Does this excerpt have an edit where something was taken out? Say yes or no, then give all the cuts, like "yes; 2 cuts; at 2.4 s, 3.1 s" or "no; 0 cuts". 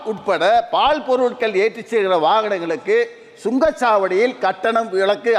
no; 0 cuts